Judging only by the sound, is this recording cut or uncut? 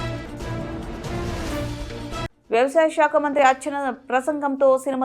uncut